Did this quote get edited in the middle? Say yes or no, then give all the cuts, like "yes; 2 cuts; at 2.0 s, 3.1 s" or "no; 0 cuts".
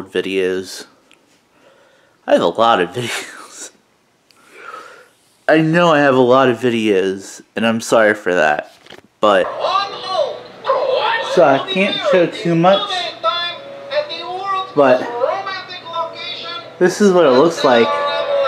yes; 1 cut; at 9.5 s